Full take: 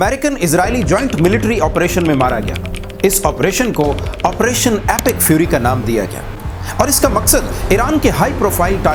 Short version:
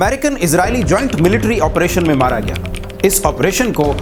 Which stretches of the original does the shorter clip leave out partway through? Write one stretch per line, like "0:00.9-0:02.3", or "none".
none